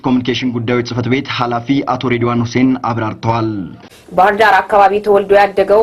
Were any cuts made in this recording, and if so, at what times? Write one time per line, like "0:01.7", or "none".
0:03.8